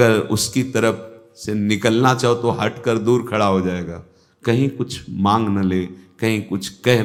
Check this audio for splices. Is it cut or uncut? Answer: uncut